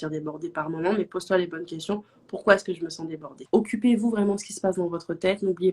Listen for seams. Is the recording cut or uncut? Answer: cut